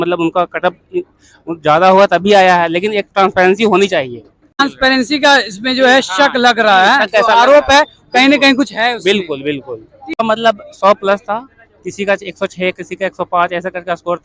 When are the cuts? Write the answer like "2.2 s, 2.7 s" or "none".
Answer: 4.6 s, 10.2 s